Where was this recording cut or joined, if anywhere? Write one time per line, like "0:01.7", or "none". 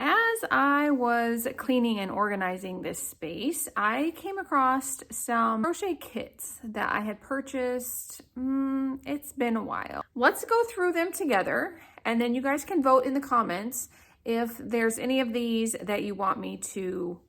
0:05.6
0:10.0